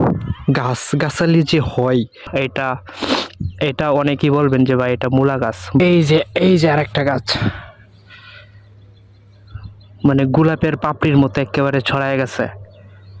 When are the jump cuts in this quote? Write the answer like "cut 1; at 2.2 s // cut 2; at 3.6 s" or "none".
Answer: cut 1; at 2.2 s // cut 2; at 5.8 s